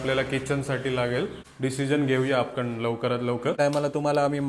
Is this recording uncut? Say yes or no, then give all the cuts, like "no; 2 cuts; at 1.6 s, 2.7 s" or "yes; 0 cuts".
no; 2 cuts; at 1.4 s, 3.6 s